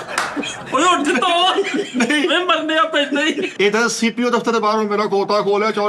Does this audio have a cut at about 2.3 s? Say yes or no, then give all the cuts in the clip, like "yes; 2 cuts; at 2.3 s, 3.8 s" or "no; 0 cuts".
no; 1 cut; at 3.5 s